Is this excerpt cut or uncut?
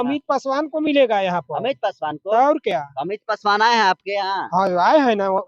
uncut